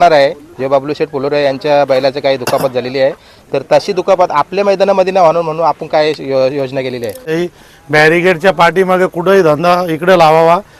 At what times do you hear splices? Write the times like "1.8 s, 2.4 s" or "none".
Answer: 7.3 s

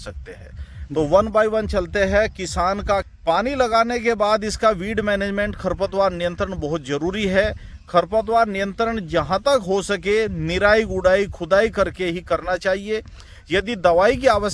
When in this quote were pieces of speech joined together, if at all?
3.1 s

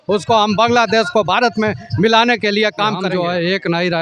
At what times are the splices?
3.1 s

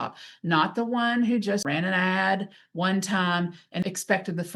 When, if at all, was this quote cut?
1.6 s, 3.8 s

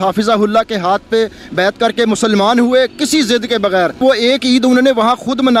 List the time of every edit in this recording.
4.0 s

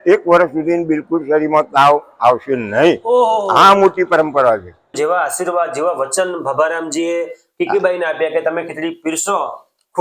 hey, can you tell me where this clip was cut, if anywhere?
4.9 s

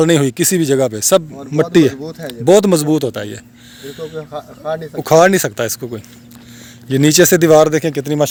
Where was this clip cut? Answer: none

